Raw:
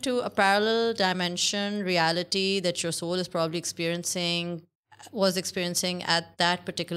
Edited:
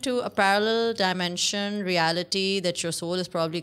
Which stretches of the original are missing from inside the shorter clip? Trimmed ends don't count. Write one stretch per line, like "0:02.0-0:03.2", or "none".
none